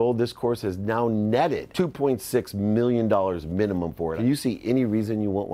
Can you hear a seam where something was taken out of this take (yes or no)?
yes